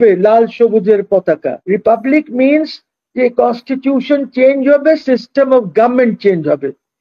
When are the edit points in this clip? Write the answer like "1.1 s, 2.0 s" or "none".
1.6 s